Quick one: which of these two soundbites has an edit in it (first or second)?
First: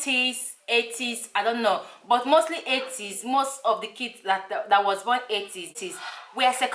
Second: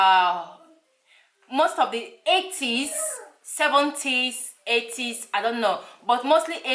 first